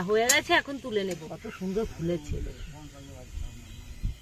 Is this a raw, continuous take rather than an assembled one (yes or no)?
no